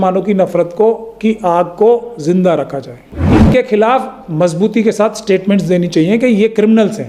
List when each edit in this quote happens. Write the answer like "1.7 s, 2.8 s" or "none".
3.3 s